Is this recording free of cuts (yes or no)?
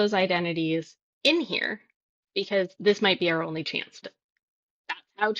no